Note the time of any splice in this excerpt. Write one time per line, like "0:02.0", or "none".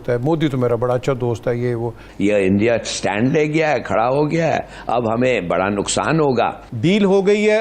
0:02.0
0:06.6